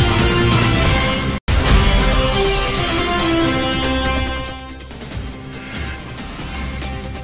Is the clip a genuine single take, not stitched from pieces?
no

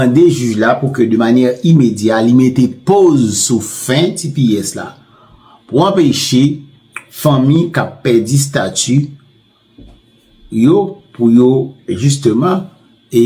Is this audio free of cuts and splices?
yes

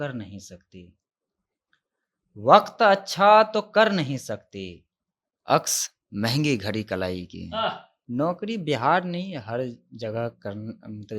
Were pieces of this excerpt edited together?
yes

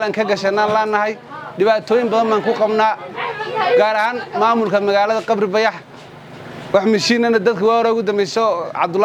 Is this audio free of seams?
yes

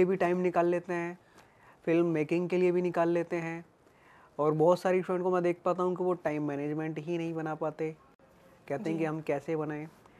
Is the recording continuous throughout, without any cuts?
yes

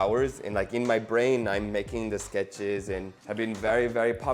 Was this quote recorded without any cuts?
no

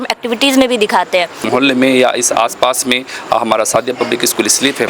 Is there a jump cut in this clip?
yes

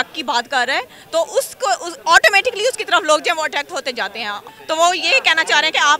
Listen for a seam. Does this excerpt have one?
yes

